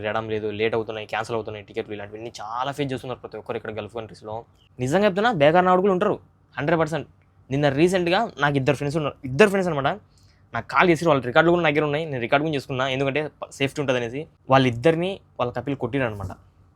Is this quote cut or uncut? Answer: cut